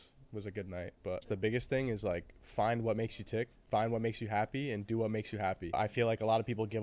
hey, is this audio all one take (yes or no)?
no